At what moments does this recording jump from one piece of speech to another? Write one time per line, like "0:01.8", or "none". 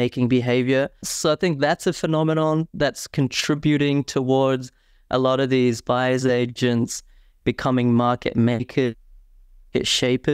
0:01.1